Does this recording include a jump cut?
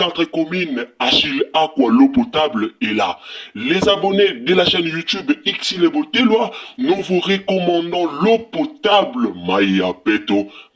no; 0 cuts

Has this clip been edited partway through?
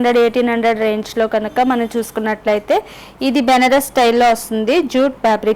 no; 0 cuts

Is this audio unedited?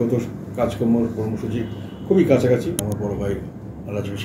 no; 1 cut; at 2.9 s

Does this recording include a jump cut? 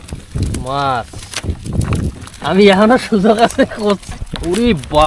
yes; 1 cut; at 4.1 s

